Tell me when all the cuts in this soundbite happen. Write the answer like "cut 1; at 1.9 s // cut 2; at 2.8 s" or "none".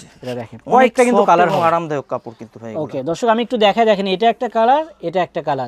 none

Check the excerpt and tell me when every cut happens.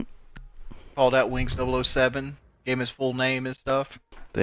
cut 1; at 3.5 s

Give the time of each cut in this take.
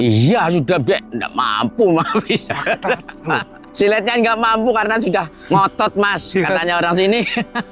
cut 1; at 3.6 s // cut 2; at 5.4 s

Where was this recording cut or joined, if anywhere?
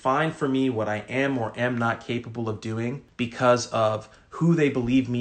cut 1; at 3.0 s

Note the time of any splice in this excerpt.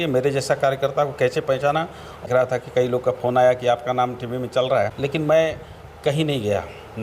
cut 1; at 2.2 s // cut 2; at 4.9 s

